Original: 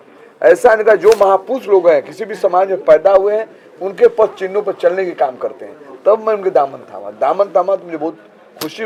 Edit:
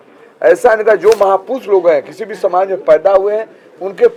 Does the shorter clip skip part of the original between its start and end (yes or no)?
no